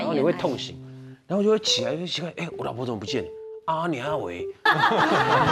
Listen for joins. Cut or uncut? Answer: cut